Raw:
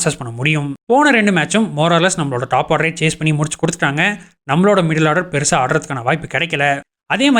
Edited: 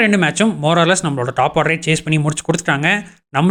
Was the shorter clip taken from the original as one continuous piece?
yes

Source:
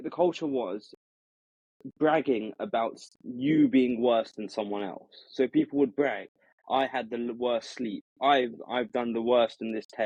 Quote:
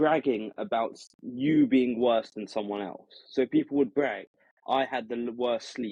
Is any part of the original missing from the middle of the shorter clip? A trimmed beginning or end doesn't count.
no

